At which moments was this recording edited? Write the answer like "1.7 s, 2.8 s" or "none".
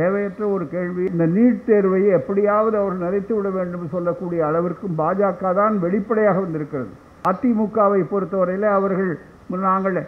1.1 s, 7.2 s